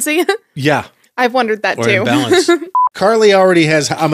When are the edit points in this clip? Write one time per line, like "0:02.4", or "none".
0:02.8